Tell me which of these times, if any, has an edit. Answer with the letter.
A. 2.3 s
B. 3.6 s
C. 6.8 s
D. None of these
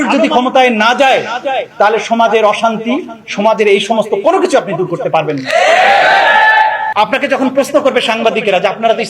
C